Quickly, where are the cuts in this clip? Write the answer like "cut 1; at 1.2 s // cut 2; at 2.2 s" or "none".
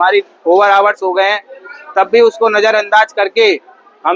none